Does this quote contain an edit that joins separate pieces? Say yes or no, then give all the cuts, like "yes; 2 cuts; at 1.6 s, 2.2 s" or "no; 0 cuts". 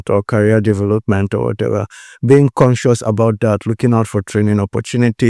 no; 0 cuts